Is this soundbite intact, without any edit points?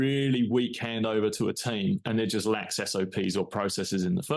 yes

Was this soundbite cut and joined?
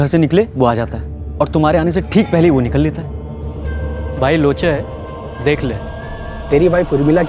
no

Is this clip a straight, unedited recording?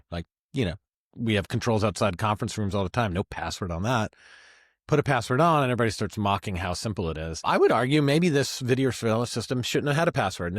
no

